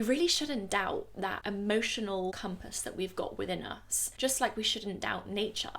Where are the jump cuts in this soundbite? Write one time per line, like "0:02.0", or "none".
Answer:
0:01.4
0:02.4

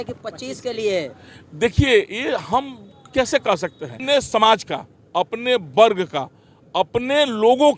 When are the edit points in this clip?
0:04.0

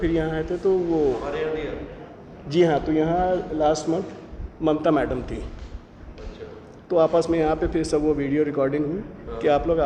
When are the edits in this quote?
none

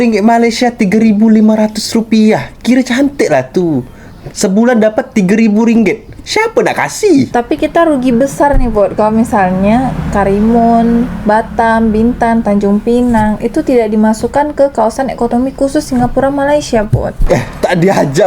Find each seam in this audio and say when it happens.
0:07.3

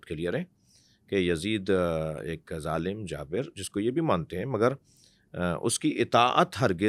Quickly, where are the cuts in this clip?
none

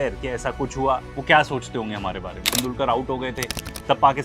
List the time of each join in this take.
0:02.5

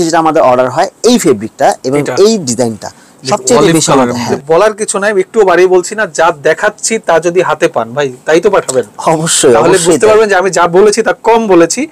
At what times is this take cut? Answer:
0:04.3

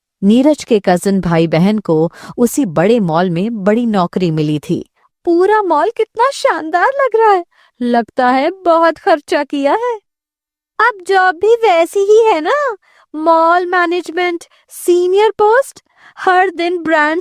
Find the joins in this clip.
0:05.1

